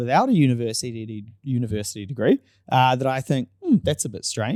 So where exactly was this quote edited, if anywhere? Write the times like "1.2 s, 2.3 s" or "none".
none